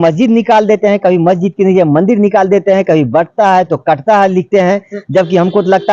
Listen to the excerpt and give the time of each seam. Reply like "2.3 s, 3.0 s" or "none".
none